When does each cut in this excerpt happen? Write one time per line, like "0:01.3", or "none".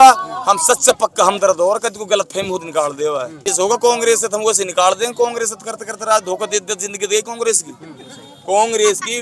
0:03.5